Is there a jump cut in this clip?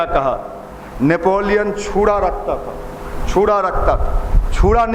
no; 0 cuts

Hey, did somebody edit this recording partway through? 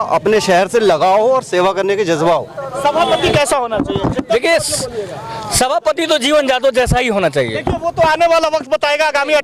no; 0 cuts

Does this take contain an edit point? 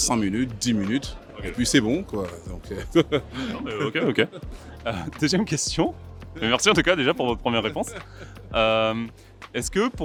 no; 0 cuts

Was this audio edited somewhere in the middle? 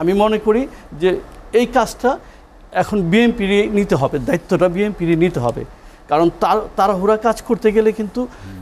no; 0 cuts

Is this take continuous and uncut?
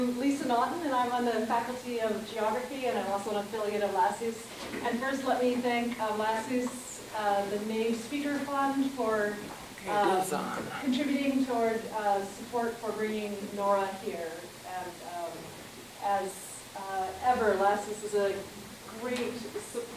no; 1 cut; at 6.1 s

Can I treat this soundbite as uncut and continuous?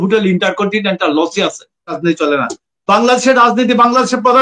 no; 1 cut; at 2.0 s

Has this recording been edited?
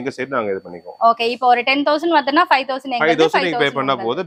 no; 0 cuts

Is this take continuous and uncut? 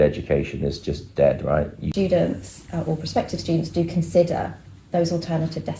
no; 1 cut; at 1.8 s

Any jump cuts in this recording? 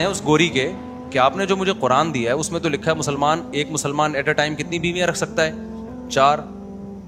no; 0 cuts

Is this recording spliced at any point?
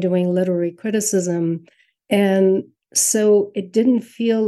no; 0 cuts

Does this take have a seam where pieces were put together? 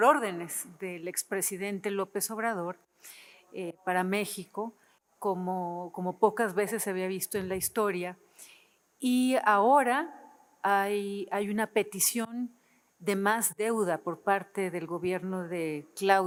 no; 0 cuts

